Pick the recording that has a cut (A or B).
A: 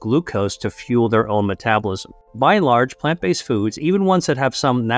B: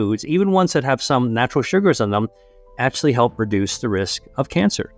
A